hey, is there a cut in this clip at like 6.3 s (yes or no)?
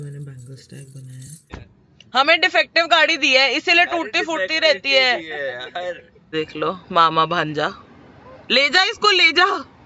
yes